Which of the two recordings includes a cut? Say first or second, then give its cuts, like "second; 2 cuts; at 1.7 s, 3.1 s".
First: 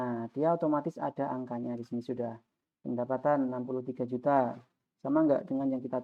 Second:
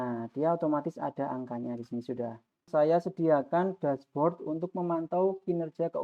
second; 1 cut; at 2.7 s